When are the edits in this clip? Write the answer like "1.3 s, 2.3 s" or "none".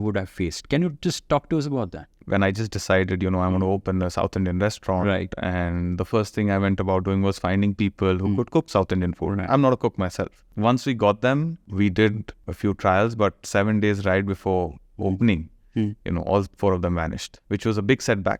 2.2 s, 10.4 s, 11.6 s, 12.4 s, 17.3 s

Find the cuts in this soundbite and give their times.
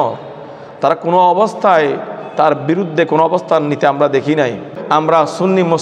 4.8 s

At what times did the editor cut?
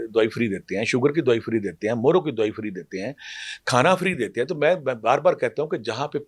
none

